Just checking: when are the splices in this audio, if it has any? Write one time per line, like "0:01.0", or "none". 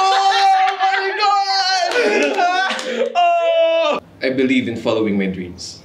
0:04.0